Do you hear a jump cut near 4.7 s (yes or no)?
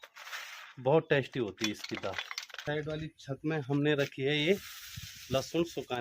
no